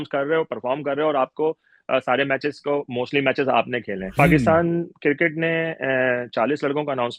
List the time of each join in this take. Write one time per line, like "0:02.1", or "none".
0:04.1